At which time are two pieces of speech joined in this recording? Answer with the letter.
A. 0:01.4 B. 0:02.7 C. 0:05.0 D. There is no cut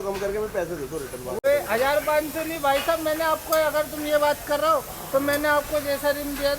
A